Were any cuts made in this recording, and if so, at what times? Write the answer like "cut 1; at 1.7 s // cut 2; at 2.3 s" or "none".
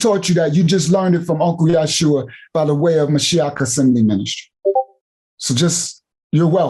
cut 1; at 4.4 s